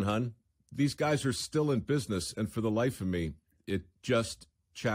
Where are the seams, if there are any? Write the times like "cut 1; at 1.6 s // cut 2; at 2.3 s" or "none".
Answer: none